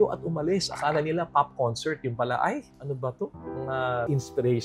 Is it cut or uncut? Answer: uncut